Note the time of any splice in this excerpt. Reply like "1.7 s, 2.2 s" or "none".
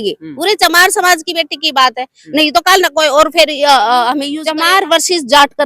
4.4 s